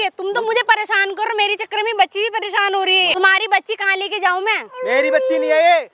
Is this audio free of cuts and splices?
no; 1 cut; at 3.1 s

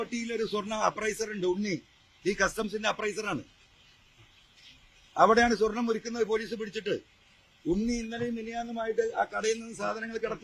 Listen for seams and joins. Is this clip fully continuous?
yes; 0 cuts

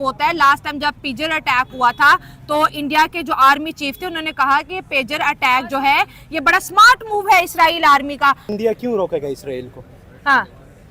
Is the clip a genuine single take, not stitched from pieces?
no; 1 cut; at 8.5 s

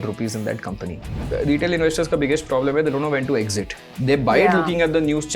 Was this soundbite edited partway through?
yes; 1 cut; at 1.1 s

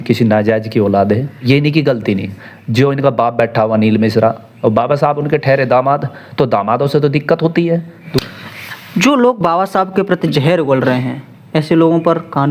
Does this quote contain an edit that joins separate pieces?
no; 0 cuts

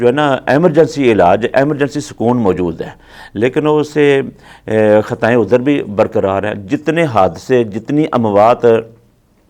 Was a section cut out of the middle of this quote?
no; 0 cuts

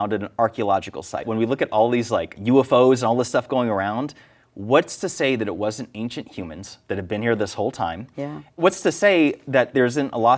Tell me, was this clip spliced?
yes; 2 cuts; at 1.3 s, 8.6 s

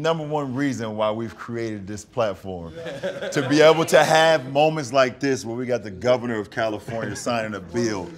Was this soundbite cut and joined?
no; 0 cuts

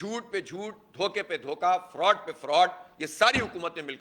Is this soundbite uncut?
yes; 0 cuts

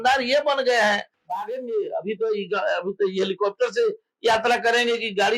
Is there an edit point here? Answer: yes; 1 cut; at 1.2 s

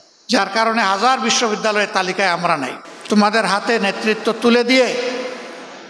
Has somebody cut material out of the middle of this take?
yes; 1 cut; at 2.8 s

